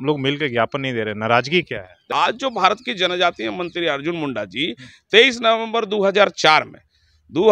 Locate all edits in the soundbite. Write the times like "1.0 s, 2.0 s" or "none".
2.1 s